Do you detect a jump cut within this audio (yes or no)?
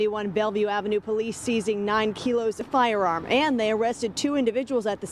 yes